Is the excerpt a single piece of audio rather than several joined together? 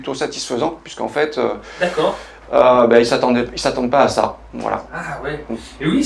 yes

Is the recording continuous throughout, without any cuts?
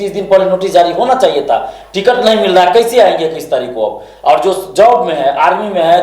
yes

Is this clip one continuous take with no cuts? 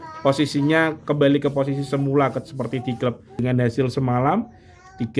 no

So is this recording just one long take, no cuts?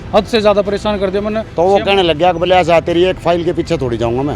no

